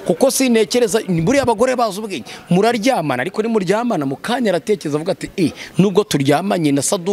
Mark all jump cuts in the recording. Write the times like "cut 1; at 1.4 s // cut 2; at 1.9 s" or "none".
none